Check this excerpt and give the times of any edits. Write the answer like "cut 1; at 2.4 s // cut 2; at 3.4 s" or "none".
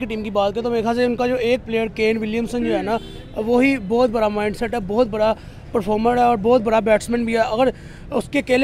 none